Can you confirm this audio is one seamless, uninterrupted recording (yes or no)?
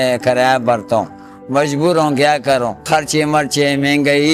yes